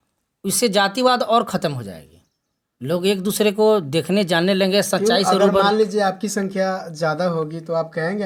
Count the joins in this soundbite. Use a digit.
0